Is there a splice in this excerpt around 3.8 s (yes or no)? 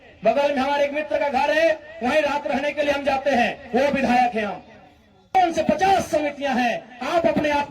no